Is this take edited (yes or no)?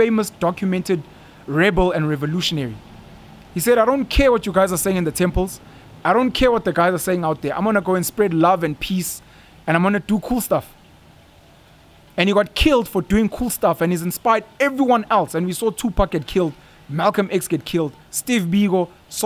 no